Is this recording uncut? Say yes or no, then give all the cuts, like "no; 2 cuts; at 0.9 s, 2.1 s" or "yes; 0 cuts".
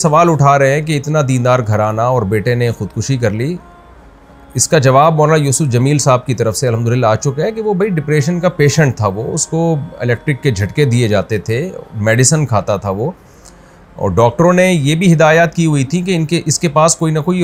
yes; 0 cuts